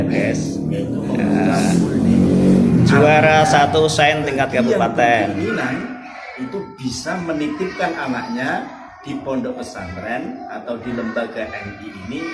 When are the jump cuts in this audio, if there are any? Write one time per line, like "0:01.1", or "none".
0:05.3